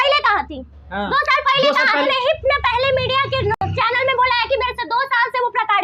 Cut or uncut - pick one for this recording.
uncut